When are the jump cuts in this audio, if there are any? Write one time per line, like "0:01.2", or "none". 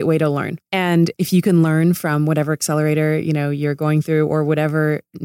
0:00.9